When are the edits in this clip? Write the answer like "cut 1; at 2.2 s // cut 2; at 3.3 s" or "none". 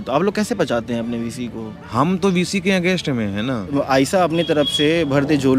cut 1; at 1.8 s // cut 2; at 3.6 s